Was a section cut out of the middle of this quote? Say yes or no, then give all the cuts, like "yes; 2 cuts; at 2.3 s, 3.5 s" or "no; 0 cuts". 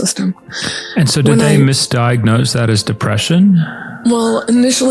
no; 0 cuts